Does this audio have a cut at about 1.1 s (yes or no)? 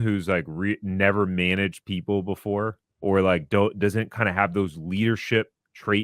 no